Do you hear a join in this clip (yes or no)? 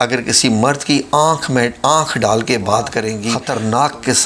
yes